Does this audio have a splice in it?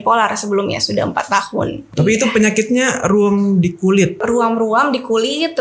yes; 2 cuts; at 1.8 s, 4.2 s

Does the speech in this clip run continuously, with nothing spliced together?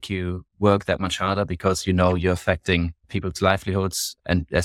no; 1 cut; at 3.0 s

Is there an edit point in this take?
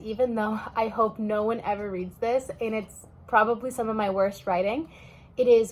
no; 0 cuts

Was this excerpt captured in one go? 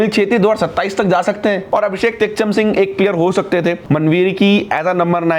no; 2 cuts; at 1.6 s, 3.8 s

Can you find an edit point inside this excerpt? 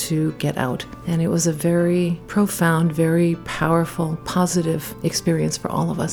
yes; 3 cuts; at 0.9 s, 2.2 s, 4.9 s

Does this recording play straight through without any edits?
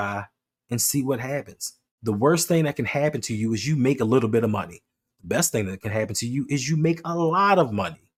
yes; 0 cuts

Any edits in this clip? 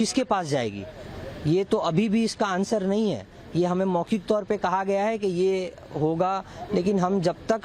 no; 0 cuts

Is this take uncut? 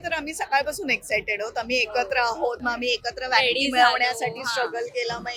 yes; 0 cuts

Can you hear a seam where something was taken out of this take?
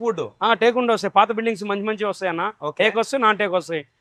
no; 0 cuts

